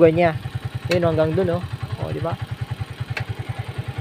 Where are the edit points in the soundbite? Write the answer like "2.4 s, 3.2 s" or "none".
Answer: none